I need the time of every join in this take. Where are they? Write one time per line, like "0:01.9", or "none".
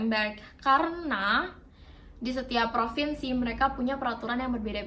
none